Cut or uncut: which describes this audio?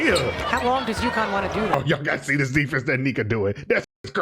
cut